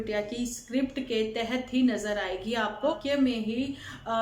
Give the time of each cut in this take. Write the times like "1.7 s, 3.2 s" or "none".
3.0 s